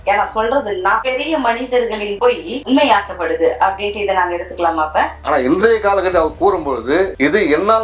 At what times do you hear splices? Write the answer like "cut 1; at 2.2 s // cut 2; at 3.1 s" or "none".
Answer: cut 1; at 1.0 s // cut 2; at 5.2 s